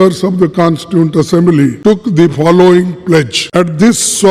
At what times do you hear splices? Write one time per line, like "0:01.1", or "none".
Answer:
0:01.8
0:03.4